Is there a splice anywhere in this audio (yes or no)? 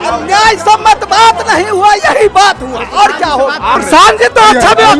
yes